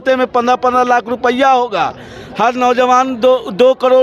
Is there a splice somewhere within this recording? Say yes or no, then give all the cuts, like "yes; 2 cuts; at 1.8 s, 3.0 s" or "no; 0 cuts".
no; 0 cuts